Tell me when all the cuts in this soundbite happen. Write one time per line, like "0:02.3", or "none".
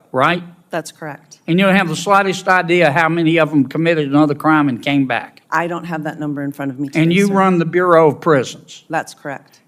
none